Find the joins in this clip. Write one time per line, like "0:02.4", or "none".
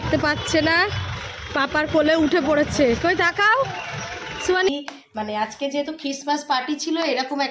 0:04.7